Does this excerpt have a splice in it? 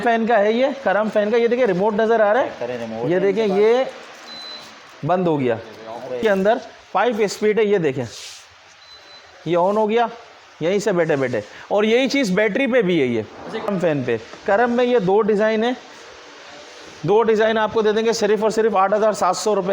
yes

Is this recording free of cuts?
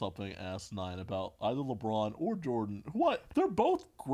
no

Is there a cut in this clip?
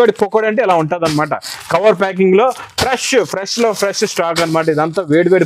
no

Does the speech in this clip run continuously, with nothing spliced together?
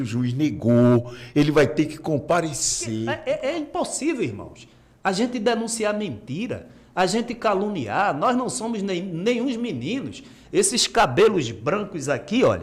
no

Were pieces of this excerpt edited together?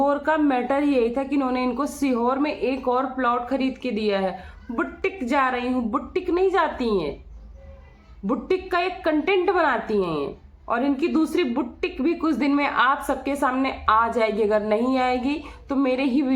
no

